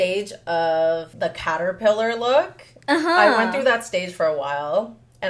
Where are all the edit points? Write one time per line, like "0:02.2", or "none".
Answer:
0:01.1

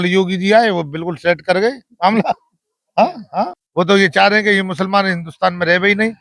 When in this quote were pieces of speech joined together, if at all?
0:03.6

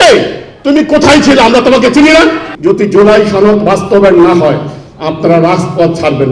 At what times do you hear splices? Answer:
0:02.5

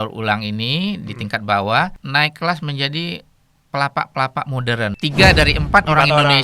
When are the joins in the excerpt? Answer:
0:02.0
0:04.9

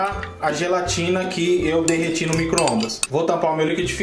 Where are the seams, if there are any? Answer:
0:03.0

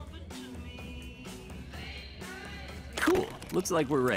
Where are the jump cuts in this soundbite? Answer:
0:03.1

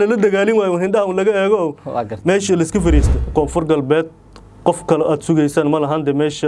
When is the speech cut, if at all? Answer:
0:03.2

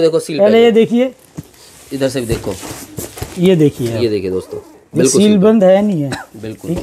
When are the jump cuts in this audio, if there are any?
none

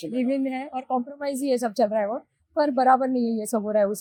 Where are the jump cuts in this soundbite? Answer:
none

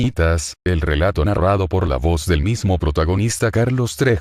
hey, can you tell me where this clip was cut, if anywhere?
0:02.1

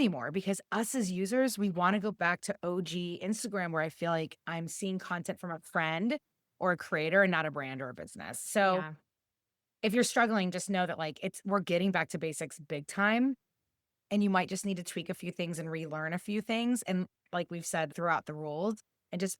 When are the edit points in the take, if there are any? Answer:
0:17.9

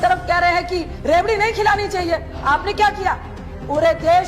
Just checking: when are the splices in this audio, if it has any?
0:00.9

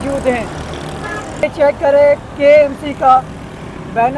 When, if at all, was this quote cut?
0:01.4

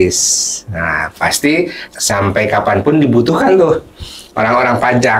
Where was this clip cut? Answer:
0:01.8

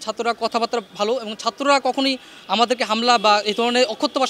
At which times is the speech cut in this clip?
none

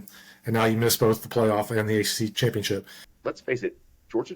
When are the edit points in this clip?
0:02.3
0:03.1

